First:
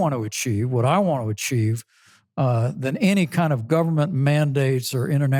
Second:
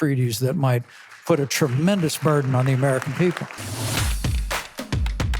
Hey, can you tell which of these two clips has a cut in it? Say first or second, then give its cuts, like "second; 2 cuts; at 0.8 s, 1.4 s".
second; 1 cut; at 3.6 s